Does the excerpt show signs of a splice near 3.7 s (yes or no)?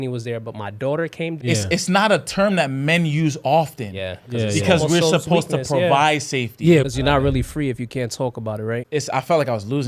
no